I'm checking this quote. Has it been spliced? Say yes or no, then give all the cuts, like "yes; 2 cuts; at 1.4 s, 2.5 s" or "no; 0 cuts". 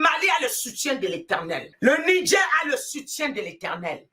yes; 1 cut; at 1.7 s